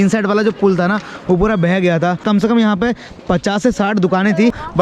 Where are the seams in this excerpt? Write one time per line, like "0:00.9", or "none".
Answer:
0:02.2